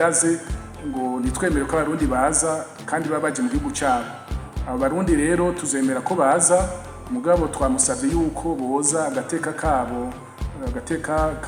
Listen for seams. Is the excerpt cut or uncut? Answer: uncut